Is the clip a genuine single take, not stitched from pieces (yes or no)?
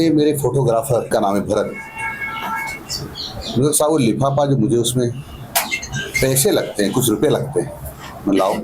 no